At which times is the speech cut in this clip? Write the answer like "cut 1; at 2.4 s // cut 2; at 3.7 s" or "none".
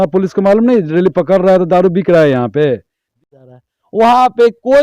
cut 1; at 3.1 s